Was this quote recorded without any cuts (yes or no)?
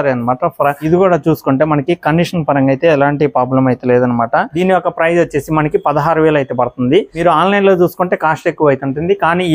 no